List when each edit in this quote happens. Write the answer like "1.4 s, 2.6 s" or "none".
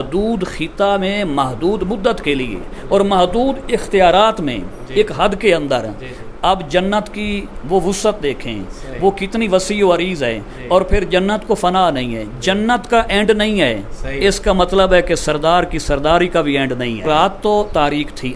17.0 s